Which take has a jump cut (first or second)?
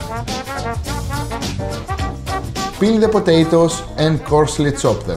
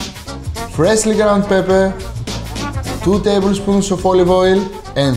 second